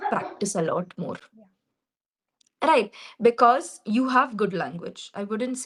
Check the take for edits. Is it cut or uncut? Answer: uncut